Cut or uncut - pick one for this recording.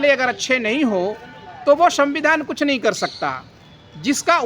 uncut